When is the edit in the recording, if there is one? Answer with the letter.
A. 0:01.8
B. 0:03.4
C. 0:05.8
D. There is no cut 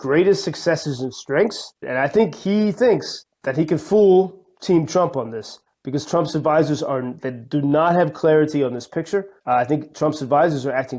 A